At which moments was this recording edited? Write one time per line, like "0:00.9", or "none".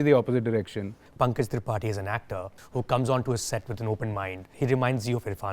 0:01.0
0:02.5
0:04.5